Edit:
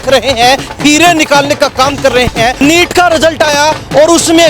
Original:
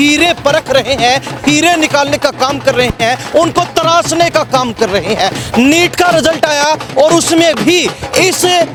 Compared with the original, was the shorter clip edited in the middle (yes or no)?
yes